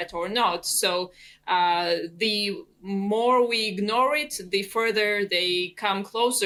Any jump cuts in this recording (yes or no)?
no